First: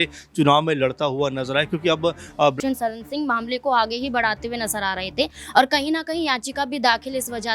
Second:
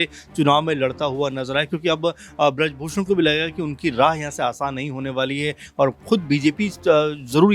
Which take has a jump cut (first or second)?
first